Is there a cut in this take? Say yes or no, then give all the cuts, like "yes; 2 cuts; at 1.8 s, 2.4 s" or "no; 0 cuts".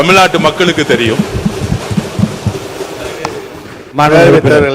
no; 0 cuts